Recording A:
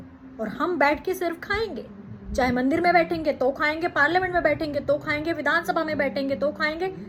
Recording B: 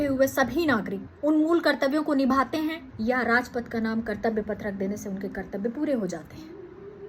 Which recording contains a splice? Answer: B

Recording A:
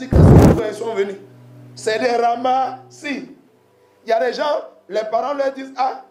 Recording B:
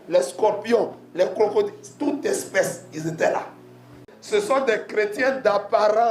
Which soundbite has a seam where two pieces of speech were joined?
B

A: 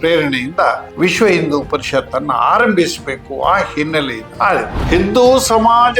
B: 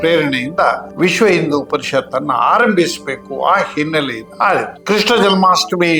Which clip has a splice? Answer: A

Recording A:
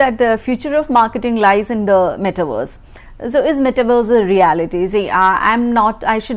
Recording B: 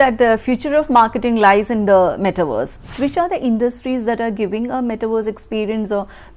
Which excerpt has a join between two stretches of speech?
B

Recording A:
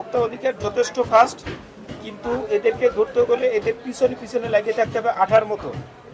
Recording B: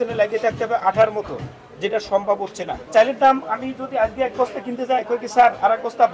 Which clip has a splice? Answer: B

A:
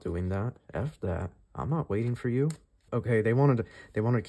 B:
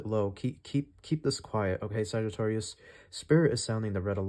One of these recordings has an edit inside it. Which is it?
A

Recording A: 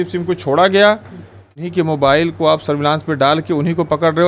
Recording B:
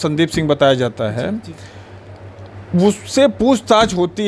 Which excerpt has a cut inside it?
A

